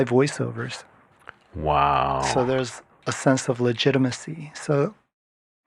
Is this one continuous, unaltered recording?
yes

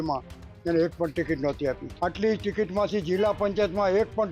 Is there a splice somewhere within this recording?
yes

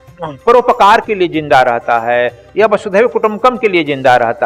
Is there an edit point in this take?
no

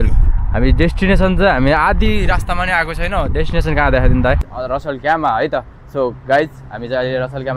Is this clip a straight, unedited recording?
no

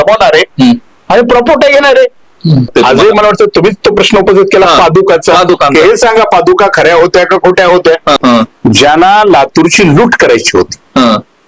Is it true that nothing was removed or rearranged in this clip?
no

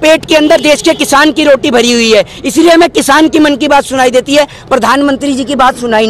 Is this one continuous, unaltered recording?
yes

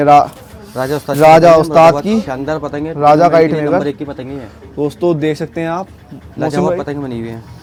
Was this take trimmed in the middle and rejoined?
no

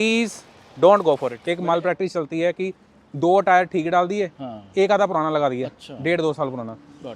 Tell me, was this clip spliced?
yes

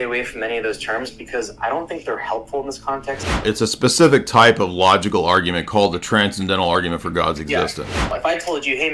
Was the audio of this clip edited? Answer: yes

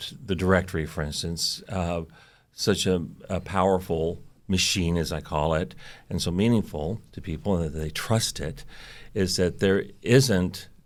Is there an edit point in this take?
no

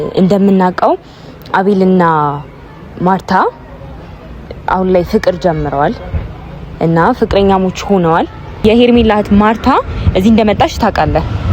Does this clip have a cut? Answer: yes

